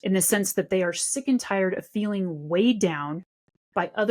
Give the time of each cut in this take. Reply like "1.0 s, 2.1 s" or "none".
none